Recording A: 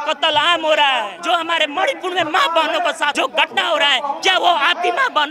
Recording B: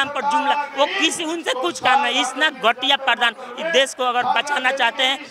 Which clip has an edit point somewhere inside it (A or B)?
A